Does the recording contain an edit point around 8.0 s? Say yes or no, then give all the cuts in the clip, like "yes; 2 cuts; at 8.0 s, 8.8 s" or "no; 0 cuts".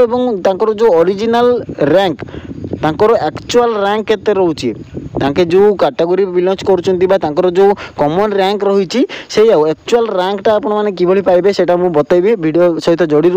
no; 0 cuts